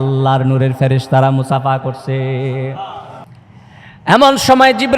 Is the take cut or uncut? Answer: cut